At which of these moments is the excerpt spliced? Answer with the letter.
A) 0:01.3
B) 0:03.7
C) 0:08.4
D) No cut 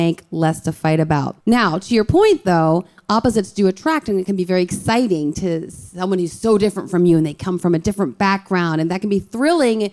A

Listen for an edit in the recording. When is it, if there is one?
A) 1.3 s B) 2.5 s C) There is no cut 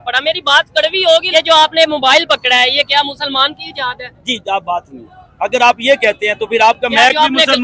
A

